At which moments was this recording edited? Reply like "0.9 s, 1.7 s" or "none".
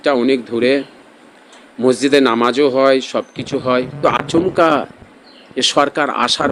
4.0 s